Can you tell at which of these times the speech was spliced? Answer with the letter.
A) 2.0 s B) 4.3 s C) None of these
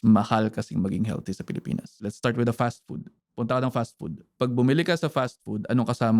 A